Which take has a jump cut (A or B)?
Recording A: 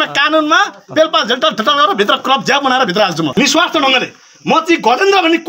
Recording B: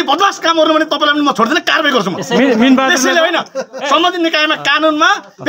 A